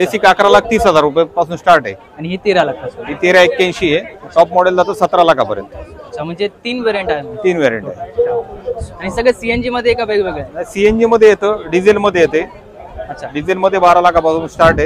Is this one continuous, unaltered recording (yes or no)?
yes